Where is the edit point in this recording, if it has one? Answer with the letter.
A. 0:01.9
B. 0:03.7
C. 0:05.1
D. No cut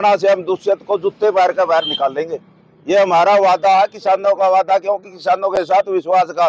D